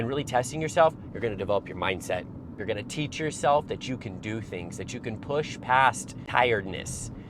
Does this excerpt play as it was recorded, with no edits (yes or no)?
no